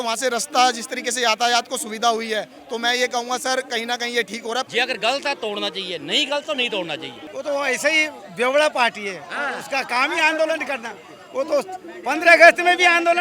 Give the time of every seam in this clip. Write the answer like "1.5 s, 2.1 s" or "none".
4.7 s, 7.2 s